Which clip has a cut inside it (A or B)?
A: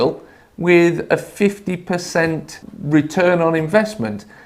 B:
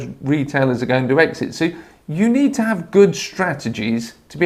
A